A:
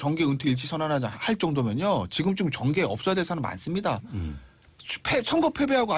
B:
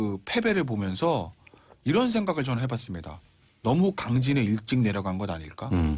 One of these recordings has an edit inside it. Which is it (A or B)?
B